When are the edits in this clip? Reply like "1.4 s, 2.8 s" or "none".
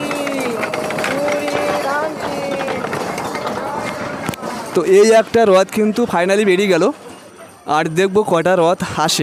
none